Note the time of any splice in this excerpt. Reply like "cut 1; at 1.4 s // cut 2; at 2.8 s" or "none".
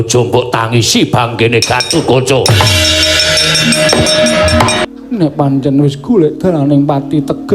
cut 1; at 4.8 s